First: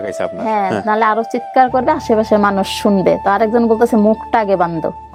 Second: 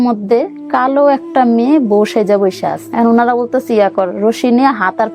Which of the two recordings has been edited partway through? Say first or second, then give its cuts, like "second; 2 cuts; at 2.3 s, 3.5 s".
second; 1 cut; at 2.8 s